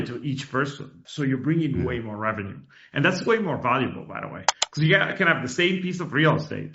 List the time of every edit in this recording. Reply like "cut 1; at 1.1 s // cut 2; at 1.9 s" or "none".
cut 1; at 1.0 s